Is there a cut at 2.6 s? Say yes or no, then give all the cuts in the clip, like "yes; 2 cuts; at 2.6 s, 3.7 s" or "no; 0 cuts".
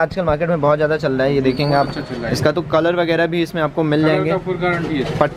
no; 0 cuts